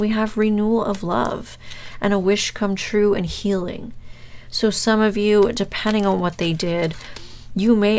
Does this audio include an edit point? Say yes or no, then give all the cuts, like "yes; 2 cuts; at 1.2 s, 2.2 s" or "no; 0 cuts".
no; 0 cuts